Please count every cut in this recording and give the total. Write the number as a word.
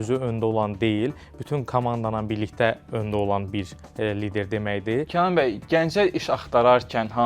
one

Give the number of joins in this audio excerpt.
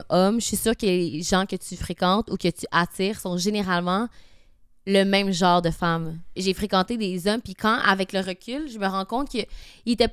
one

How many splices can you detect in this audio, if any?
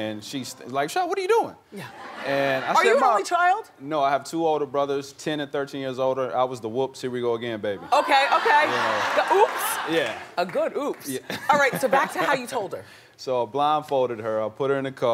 one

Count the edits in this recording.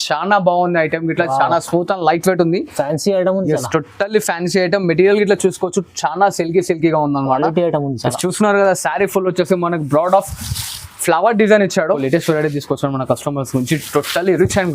one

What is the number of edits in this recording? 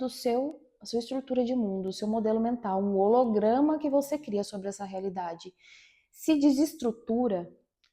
zero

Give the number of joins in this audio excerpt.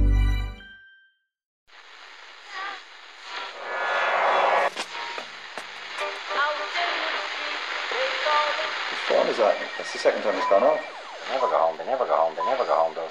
one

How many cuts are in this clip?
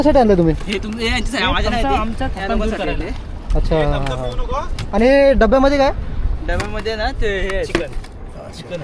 zero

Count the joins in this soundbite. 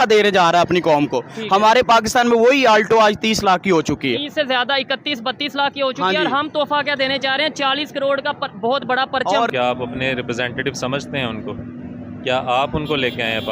one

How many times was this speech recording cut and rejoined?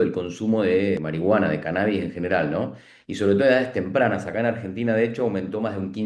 one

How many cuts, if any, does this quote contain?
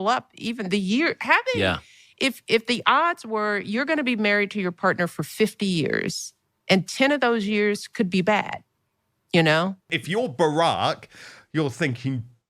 one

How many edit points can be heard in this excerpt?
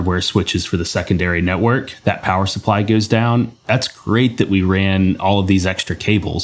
one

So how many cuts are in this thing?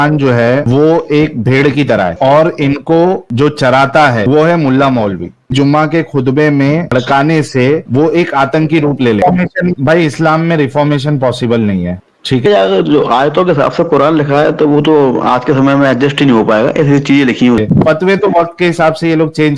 four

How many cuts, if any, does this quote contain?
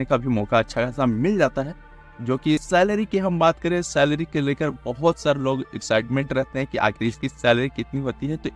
one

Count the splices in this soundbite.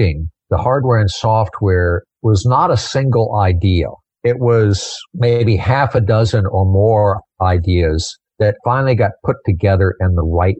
zero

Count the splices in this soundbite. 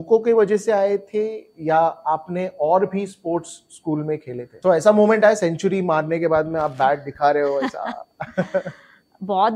one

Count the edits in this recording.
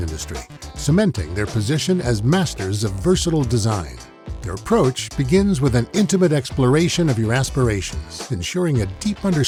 zero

